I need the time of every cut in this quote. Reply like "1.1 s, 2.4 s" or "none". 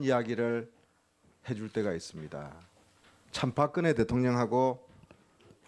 none